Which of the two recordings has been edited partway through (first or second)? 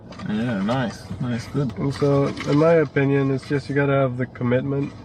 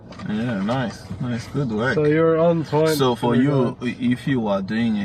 first